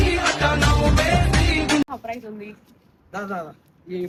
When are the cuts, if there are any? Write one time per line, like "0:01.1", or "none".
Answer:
none